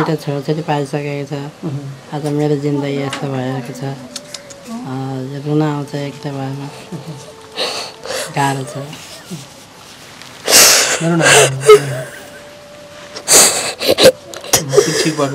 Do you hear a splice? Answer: no; 0 cuts

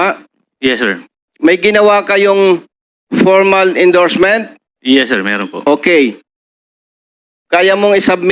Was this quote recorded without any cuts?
yes; 0 cuts

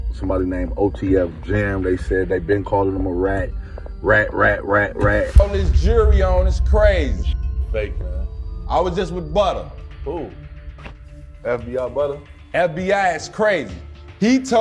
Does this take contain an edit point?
yes; 1 cut; at 5.4 s

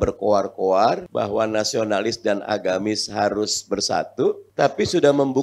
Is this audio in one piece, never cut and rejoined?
no; 2 cuts; at 1.1 s, 4.4 s

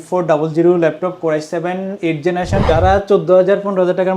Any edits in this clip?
yes; 1 cut; at 2.6 s

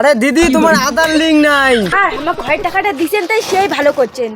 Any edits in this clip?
yes; 1 cut; at 1.9 s

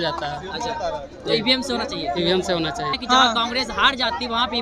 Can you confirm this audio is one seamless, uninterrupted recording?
no; 1 cut; at 3.0 s

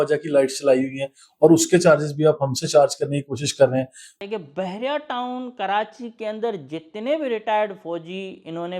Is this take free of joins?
no; 1 cut; at 4.1 s

